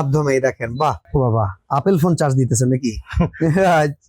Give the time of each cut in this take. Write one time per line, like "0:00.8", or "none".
0:01.0